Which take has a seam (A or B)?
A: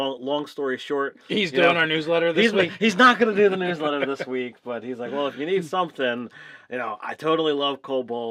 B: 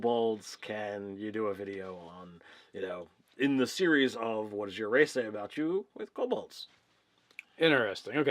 B